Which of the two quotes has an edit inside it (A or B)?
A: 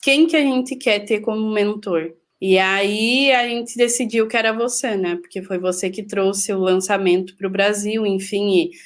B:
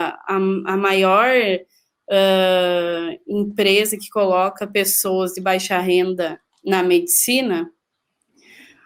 A